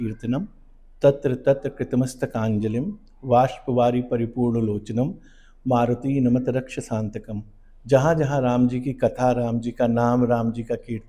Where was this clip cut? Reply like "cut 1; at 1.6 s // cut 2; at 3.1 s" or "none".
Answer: none

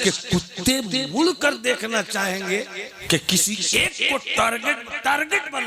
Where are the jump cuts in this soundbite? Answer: cut 1; at 2.9 s

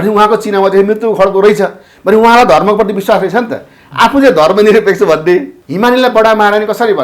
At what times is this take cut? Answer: cut 1; at 5.6 s

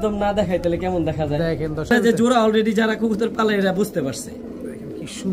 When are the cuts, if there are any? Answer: cut 1; at 1.9 s

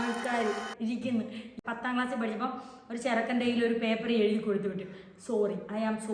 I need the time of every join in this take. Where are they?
cut 1; at 1.5 s

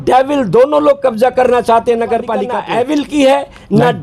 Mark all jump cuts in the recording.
cut 1; at 2.5 s

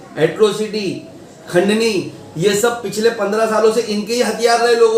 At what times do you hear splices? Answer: none

